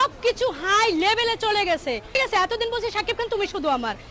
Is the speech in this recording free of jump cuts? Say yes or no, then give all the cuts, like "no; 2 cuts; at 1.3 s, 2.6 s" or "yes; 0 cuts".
yes; 0 cuts